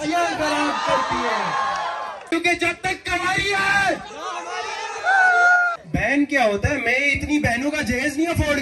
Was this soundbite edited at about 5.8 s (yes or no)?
yes